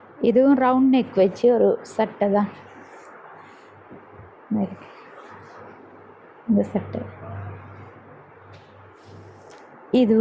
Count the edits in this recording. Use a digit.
0